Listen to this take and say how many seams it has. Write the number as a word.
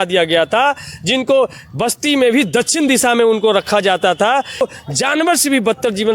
one